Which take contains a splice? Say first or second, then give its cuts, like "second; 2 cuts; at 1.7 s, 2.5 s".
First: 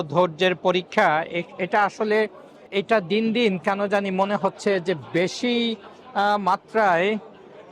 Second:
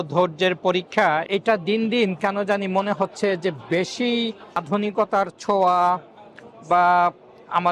second; 2 cuts; at 1.3 s, 4.6 s